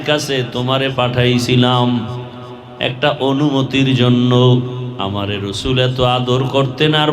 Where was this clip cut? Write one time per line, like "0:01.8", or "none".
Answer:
0:04.8